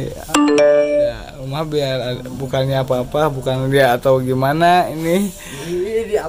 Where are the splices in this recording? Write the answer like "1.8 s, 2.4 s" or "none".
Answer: none